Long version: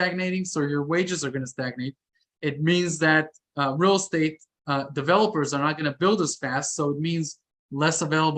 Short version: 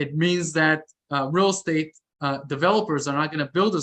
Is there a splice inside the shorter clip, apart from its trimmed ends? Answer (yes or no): no